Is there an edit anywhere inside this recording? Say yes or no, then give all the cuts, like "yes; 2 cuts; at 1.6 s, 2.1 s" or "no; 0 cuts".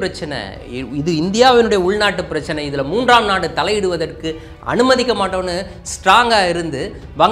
no; 0 cuts